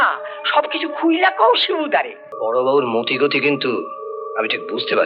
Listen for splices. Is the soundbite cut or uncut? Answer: cut